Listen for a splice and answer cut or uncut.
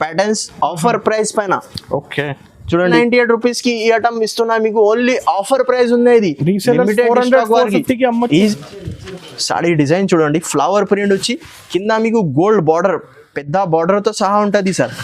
cut